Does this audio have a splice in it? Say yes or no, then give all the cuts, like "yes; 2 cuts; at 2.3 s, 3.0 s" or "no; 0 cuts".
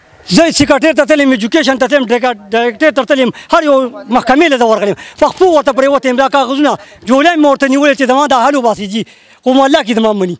no; 0 cuts